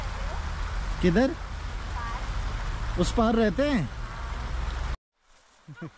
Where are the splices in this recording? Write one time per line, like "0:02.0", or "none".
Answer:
0:05.0